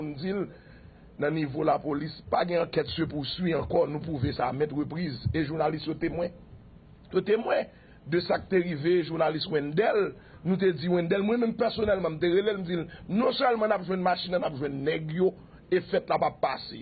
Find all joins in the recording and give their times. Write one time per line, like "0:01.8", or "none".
0:02.2

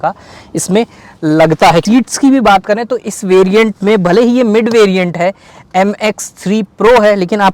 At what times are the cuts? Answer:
none

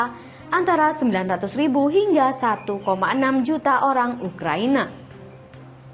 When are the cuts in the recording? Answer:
0:05.0

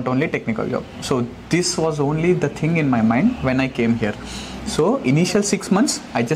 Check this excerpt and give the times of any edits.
none

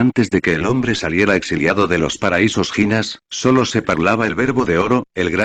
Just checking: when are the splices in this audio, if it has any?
none

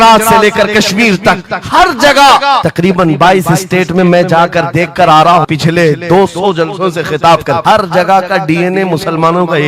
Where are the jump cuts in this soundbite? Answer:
0:02.7
0:05.5
0:07.6

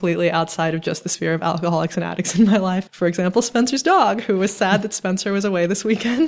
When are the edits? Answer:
0:02.9

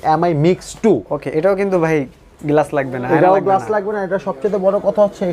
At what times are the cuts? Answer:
none

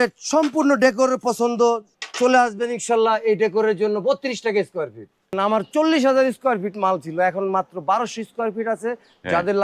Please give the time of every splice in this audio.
0:05.4

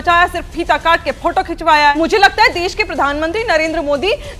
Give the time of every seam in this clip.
0:01.9

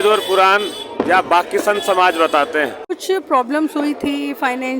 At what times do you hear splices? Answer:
0:02.9

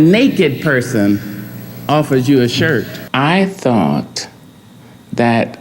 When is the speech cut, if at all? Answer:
0:03.0

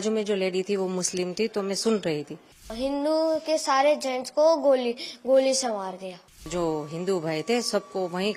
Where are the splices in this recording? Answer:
0:02.7
0:06.5

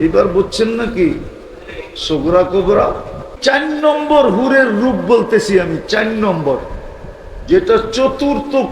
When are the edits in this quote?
0:03.3

